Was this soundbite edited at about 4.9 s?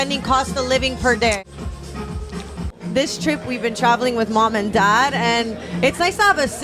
no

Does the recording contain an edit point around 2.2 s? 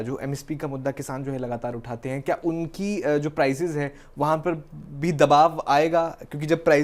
no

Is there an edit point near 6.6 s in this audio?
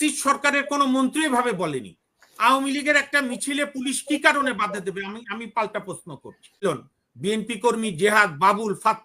yes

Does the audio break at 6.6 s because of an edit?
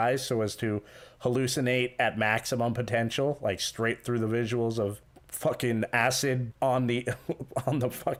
no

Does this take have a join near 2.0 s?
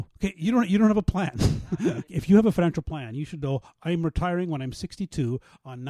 yes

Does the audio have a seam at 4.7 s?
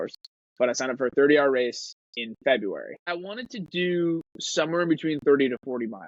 no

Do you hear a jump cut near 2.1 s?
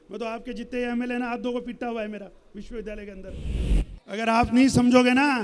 no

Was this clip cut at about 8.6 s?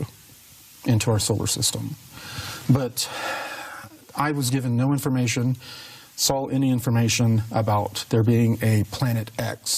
yes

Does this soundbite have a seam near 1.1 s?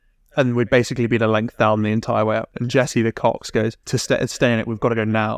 no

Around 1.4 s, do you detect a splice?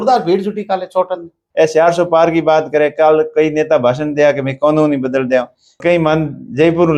yes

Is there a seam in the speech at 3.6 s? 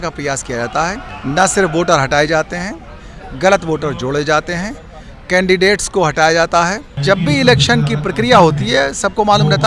no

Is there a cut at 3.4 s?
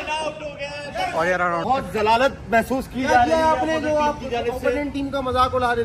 no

